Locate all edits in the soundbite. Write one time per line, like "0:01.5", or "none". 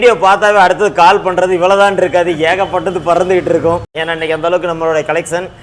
0:04.0